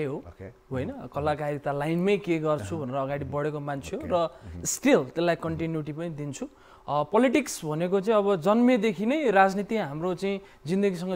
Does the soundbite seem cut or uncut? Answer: uncut